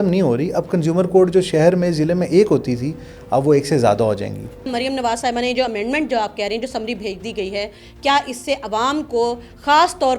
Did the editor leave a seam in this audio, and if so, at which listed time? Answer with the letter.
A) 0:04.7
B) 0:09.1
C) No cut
A